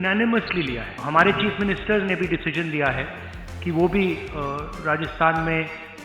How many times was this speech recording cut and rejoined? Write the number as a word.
one